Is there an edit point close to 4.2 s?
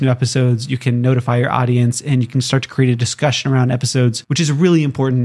yes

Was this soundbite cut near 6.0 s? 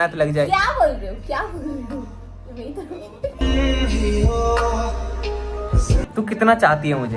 yes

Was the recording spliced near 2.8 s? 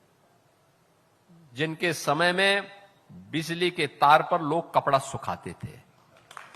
no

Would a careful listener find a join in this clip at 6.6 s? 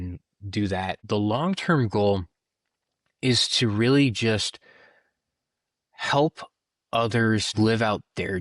no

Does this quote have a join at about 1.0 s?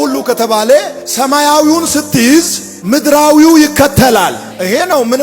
yes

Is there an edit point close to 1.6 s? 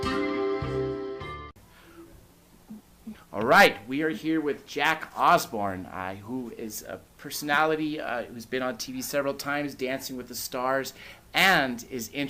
no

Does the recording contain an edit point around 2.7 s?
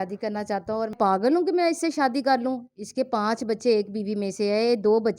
no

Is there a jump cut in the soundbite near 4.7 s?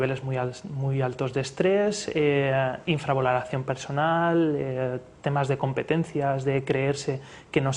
yes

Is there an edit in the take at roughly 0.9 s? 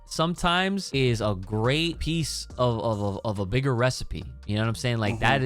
yes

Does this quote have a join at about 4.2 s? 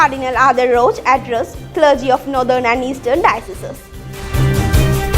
yes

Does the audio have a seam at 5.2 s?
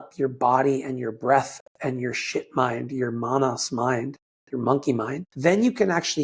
yes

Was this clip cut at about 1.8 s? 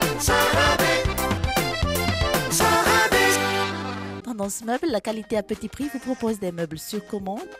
no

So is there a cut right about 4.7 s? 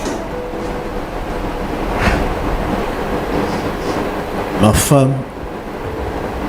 no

